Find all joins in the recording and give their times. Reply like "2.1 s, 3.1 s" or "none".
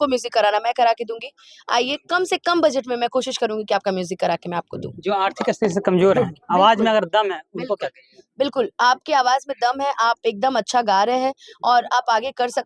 none